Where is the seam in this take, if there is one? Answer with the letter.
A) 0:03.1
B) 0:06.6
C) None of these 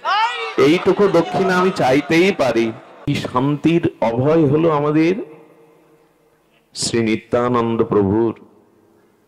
A